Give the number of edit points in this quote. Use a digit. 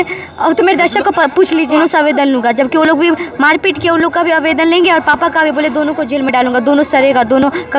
1